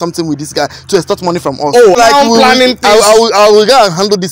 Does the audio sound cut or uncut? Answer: cut